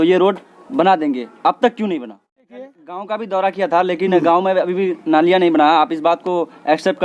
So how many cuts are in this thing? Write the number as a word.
one